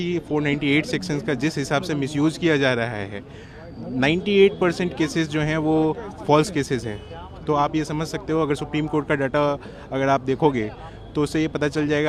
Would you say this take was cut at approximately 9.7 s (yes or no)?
no